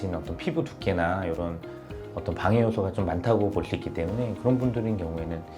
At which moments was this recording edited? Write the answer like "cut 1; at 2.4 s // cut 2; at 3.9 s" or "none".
none